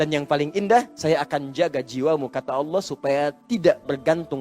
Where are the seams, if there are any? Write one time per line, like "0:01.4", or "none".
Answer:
0:00.9